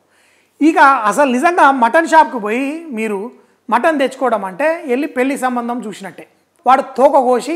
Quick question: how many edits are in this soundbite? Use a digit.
1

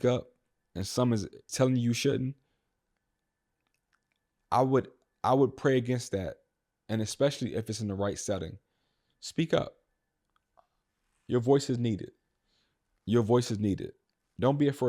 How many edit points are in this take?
1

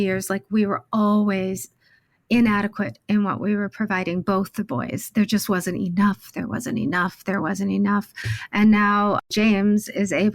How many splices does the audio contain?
1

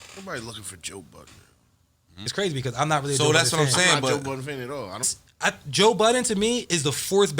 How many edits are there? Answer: 2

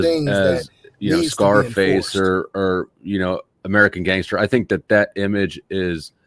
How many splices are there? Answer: 0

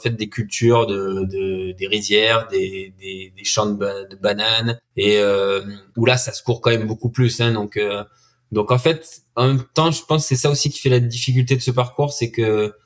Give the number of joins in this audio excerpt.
2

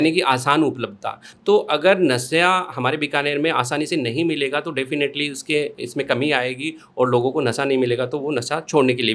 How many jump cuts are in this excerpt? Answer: 0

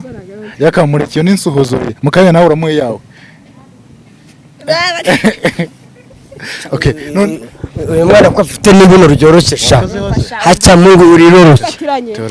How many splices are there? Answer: 0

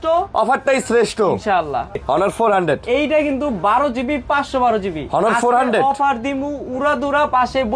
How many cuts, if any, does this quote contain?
1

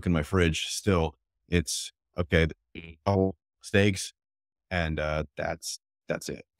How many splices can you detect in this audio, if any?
0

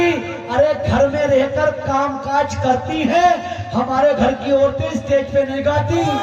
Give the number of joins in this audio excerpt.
0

